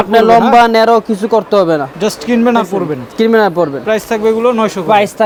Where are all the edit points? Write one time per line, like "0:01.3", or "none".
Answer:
none